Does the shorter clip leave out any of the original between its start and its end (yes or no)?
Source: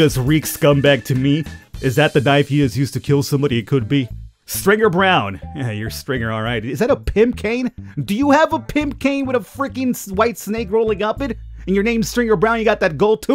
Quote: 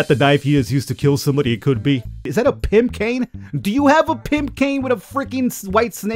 yes